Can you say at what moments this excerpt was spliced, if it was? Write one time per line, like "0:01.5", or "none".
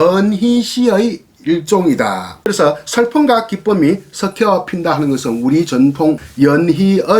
0:02.5
0:06.3